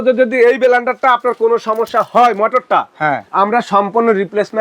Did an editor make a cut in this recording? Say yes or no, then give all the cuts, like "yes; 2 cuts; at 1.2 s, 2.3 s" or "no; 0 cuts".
yes; 1 cut; at 3.2 s